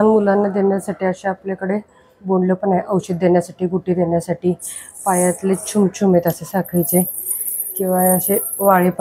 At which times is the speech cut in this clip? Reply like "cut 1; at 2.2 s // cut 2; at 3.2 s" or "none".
none